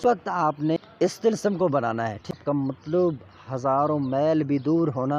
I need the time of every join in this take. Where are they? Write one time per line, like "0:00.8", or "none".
0:01.0
0:02.3